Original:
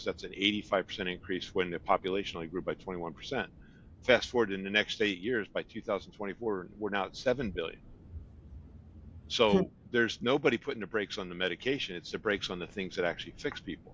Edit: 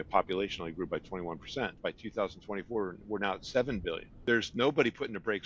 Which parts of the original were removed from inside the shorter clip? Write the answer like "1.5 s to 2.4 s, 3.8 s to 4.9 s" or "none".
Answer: 3.5 s to 5.5 s, 7.8 s to 9.8 s